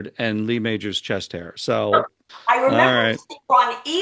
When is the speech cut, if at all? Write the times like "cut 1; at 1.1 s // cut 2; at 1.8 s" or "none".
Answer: cut 1; at 2.2 s